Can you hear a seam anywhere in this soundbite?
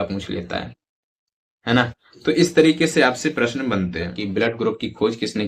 yes; 1 cut; at 4.2 s

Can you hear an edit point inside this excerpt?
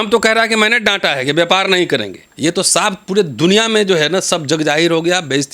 yes; 1 cut; at 2.2 s

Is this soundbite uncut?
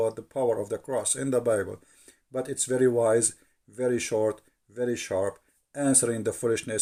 yes; 0 cuts

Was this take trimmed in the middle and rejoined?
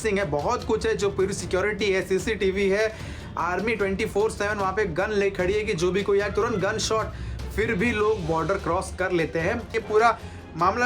yes; 1 cut; at 9.7 s

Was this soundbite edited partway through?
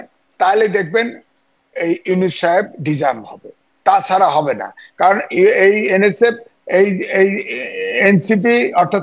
no; 0 cuts

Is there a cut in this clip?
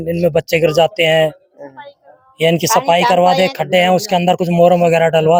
no; 0 cuts

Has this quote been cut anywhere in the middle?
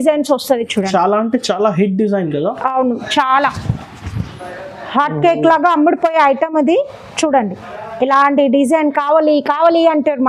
no; 0 cuts

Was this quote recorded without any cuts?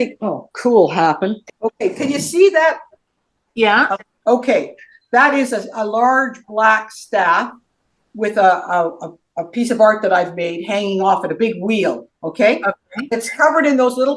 no; 3 cuts; at 1.5 s, 2.9 s, 4.1 s

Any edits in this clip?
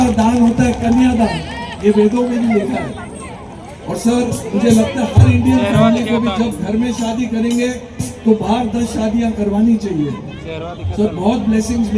no; 0 cuts

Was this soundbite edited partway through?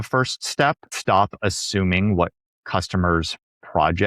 yes; 1 cut; at 0.9 s

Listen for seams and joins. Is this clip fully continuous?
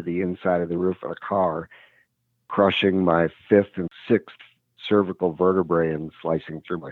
no; 1 cut; at 3.9 s

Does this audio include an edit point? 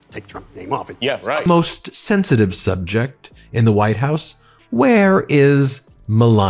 yes; 1 cut; at 1.4 s

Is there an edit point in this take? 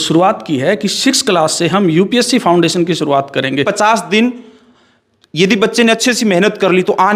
yes; 1 cut; at 3.7 s

